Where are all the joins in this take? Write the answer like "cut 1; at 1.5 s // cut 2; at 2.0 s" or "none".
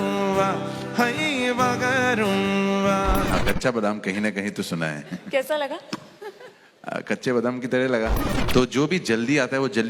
cut 1; at 3.3 s // cut 2; at 8.2 s